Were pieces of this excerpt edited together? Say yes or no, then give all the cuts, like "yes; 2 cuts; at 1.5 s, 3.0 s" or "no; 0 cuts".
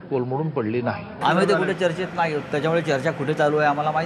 yes; 1 cut; at 1.1 s